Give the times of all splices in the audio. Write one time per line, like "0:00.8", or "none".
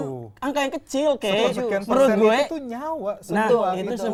none